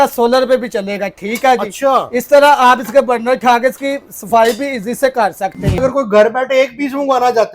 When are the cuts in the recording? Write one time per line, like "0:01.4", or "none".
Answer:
0:05.8